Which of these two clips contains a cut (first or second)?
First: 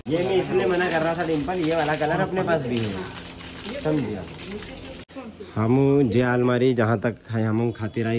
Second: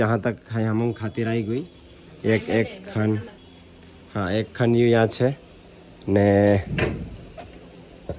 first